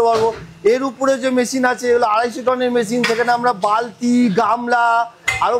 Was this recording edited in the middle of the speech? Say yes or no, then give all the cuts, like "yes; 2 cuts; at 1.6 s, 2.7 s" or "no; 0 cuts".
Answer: no; 0 cuts